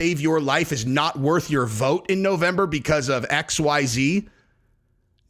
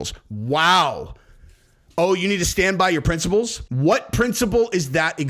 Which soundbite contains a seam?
second; 1 cut; at 3.6 s

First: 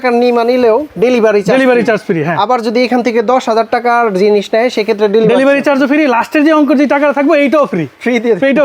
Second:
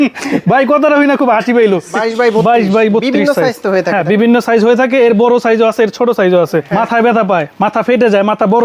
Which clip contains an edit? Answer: second; 2 cuts; at 1.9 s, 6.7 s

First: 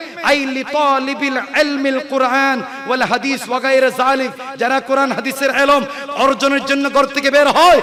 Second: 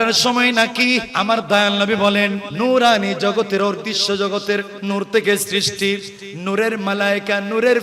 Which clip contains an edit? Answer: second; 3 cuts; at 1.1 s, 2.4 s, 4.8 s

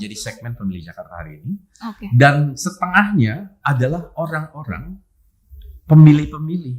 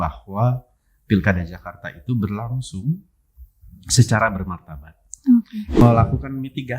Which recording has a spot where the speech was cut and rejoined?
second; 1 cut; at 5.8 s

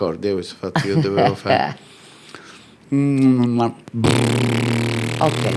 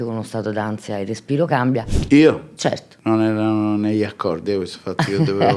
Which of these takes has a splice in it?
second; 2 cuts; at 2.0 s, 2.9 s

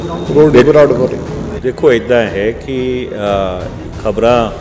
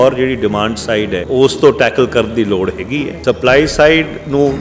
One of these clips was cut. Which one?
second; 2 cuts; at 1.2 s, 3.1 s

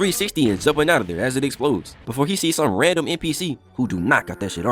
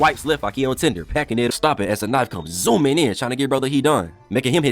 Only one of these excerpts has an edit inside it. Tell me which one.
second; 1 cut; at 1.5 s

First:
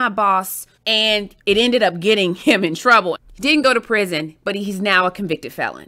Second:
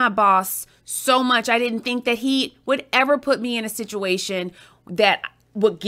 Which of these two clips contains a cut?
first; 2 cuts; at 1.2 s, 3.2 s

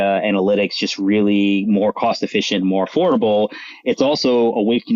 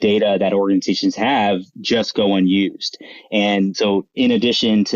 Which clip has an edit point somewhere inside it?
second; 1 cut; at 3.7 s

